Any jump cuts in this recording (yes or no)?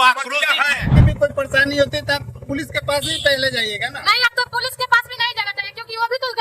yes